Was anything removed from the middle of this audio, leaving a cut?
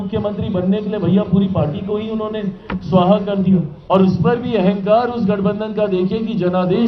yes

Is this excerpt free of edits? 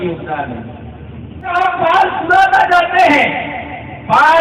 no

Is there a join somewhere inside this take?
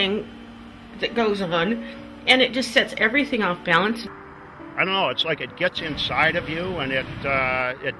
no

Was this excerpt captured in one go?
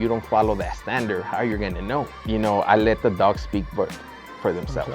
no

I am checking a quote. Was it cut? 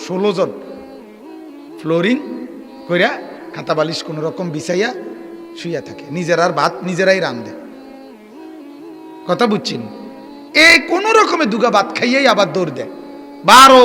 no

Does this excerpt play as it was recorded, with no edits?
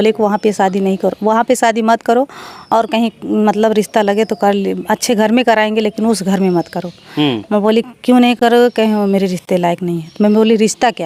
yes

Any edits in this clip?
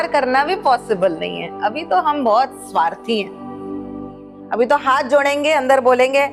no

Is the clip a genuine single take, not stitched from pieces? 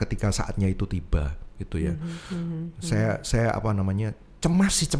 yes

